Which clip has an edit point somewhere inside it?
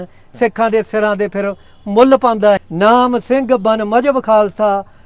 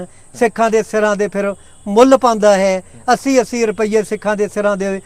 first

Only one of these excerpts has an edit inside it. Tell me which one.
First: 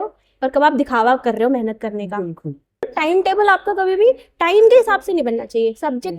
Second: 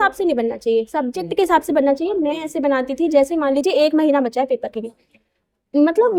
first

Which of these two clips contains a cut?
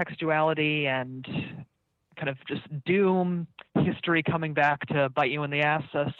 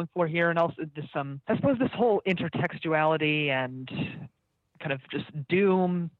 second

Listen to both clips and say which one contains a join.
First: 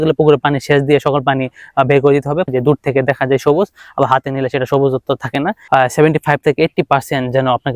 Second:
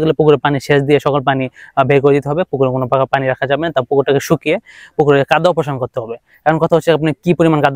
first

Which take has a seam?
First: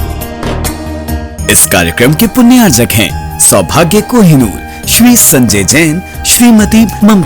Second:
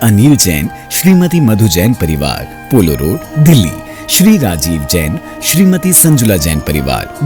first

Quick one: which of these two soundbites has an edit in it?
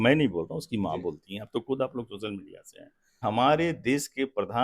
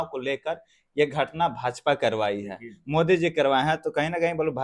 first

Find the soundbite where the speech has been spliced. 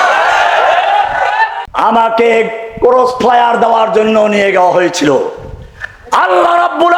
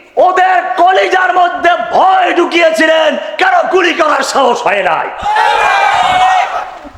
first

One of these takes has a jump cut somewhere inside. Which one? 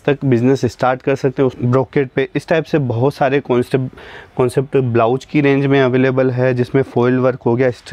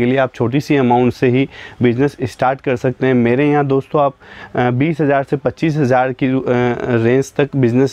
first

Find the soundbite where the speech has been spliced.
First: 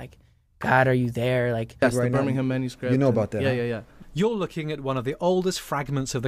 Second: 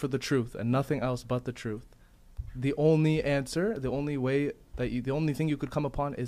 first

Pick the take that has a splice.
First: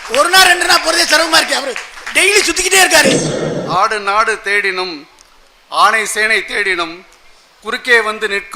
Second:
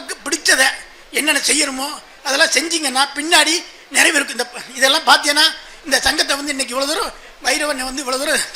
first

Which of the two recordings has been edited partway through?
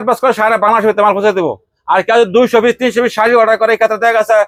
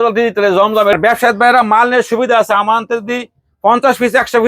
second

